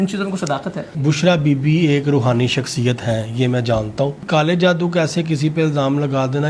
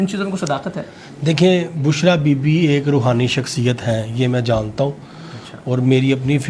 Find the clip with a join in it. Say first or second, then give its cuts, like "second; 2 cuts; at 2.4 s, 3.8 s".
first; 2 cuts; at 0.9 s, 4.2 s